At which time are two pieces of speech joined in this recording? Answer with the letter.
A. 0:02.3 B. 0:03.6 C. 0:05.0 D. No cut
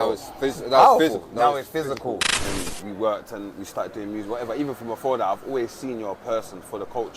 A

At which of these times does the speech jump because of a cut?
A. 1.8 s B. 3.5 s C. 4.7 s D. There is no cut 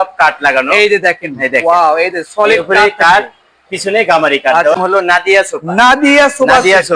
C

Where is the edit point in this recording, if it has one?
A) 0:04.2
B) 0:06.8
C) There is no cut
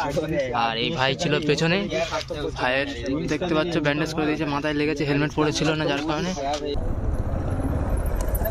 B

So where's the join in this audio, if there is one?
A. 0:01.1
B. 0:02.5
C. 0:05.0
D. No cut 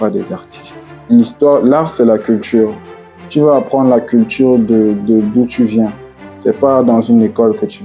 A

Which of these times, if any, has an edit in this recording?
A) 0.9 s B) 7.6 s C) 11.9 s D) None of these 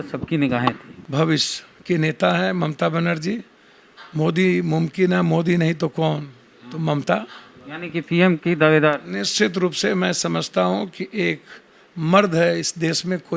A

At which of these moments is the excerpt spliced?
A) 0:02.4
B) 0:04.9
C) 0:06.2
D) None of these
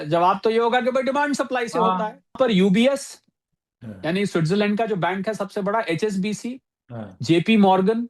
A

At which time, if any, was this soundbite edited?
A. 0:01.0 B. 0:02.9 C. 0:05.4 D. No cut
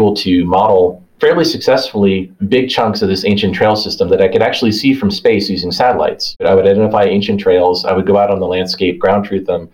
A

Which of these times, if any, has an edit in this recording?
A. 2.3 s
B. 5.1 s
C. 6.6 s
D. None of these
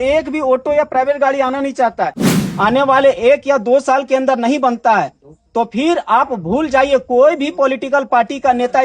A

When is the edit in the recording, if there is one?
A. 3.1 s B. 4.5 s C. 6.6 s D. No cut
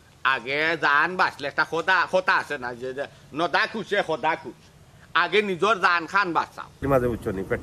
C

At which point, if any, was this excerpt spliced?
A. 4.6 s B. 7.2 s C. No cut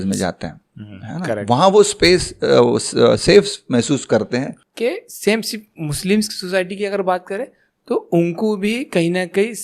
A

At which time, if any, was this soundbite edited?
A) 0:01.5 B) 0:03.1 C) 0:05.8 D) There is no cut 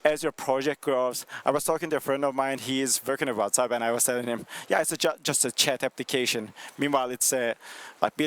B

